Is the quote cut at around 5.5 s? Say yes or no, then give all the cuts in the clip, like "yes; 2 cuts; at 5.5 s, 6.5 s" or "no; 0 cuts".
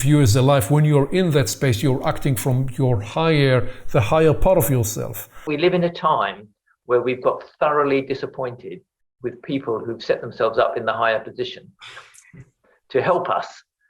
yes; 1 cut; at 5.5 s